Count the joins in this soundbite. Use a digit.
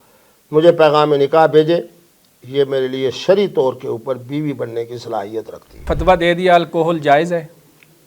1